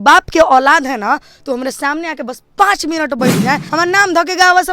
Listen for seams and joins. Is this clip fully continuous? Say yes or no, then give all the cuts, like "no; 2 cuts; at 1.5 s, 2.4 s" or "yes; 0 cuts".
no; 1 cut; at 3.7 s